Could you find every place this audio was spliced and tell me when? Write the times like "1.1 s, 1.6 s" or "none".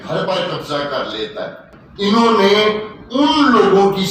none